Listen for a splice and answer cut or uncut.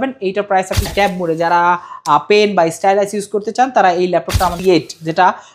cut